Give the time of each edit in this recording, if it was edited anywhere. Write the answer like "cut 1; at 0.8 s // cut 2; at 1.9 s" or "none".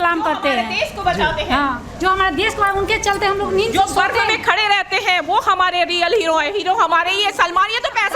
none